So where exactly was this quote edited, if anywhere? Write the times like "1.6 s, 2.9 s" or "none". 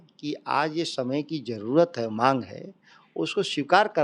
none